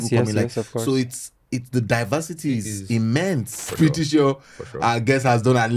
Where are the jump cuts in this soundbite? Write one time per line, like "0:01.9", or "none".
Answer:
0:03.7